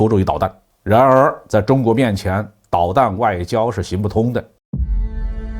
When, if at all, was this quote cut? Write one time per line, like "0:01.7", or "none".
0:04.6